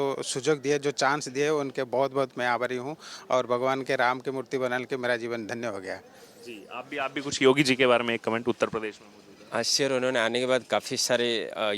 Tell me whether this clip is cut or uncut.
uncut